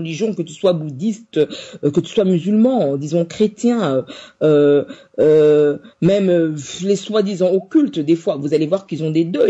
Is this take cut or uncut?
uncut